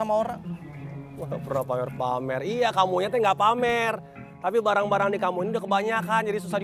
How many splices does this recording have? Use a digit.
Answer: 0